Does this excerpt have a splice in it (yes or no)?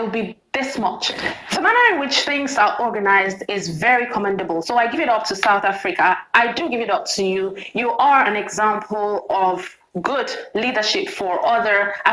no